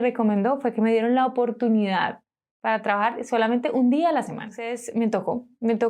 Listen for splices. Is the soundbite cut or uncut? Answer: cut